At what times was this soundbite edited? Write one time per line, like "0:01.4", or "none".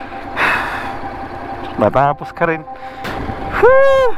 0:03.0